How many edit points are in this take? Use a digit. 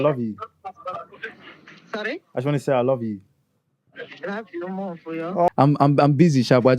1